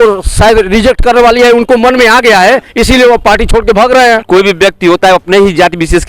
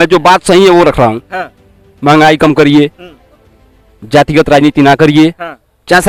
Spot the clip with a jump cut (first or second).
first